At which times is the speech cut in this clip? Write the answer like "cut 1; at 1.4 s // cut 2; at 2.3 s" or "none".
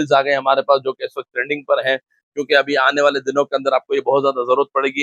none